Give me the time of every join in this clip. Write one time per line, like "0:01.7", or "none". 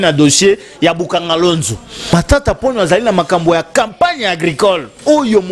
0:02.1